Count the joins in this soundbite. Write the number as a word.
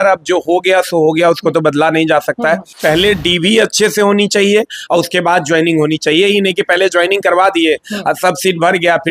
one